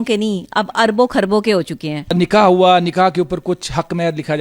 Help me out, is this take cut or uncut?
uncut